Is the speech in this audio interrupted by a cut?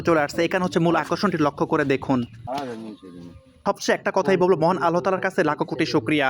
yes; 1 cut; at 3.6 s

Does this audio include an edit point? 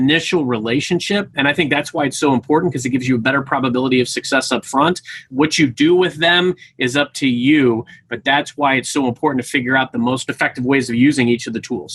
no; 0 cuts

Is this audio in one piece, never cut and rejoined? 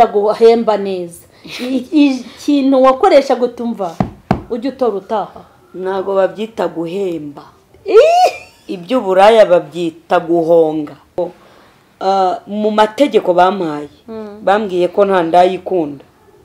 no; 1 cut; at 11.2 s

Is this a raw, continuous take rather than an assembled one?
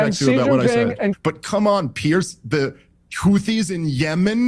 no; 1 cut; at 1.2 s

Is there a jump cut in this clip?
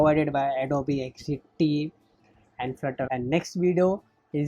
yes; 1 cut; at 3.1 s

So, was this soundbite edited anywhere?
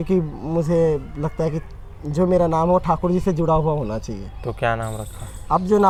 no; 0 cuts

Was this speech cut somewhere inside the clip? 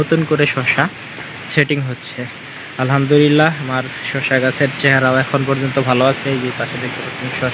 no; 0 cuts

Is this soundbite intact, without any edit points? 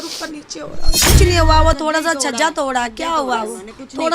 no; 1 cut; at 1.1 s

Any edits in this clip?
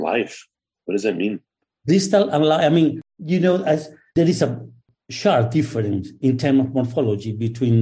no; 0 cuts

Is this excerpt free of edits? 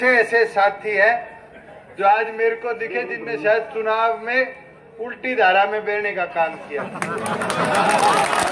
yes; 0 cuts

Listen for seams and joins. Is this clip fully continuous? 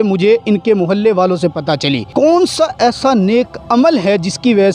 no; 1 cut; at 2.0 s

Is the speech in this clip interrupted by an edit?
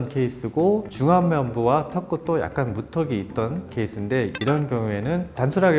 yes; 2 cuts; at 0.9 s, 3.8 s

